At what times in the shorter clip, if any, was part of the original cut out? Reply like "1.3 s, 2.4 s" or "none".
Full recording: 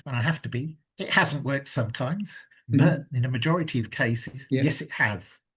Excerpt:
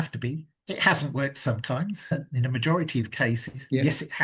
2.1 s

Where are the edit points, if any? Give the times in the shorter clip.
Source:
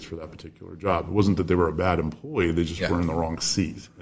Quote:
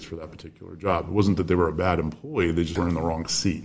2.7 s

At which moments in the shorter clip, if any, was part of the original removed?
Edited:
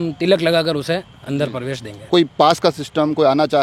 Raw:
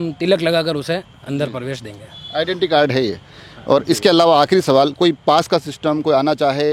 2.0 s

